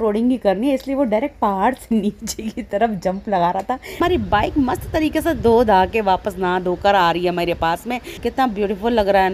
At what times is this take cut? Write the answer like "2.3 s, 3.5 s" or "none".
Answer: 4.0 s, 8.2 s